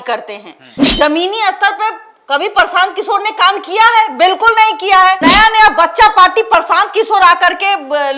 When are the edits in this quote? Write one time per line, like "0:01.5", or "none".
0:05.2